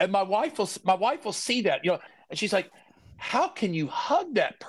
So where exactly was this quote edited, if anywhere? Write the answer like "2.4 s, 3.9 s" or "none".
2.1 s